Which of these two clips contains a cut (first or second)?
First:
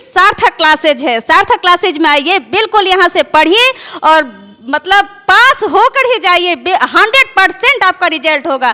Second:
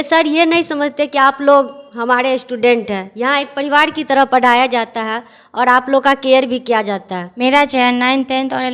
second